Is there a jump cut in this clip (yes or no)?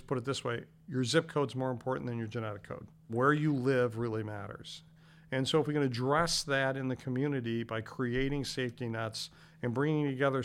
yes